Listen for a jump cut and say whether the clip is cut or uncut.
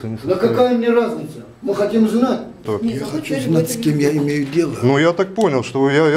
cut